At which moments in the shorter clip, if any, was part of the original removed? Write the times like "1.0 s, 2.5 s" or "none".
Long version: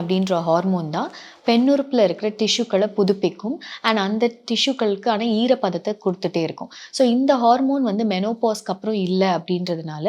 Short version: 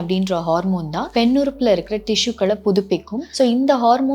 1.0 s, 3.2 s